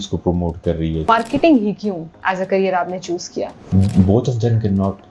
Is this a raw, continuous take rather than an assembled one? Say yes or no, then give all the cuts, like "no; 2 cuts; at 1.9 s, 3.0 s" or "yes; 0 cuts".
no; 2 cuts; at 1.1 s, 3.7 s